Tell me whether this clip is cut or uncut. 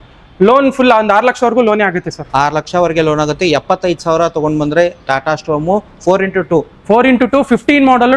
uncut